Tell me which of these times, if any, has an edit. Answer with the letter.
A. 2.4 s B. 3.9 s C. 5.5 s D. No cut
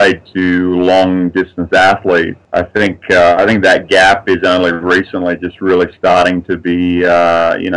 A